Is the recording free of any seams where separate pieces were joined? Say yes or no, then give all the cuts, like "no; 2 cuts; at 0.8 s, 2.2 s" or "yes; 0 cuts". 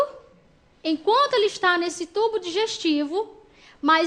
yes; 0 cuts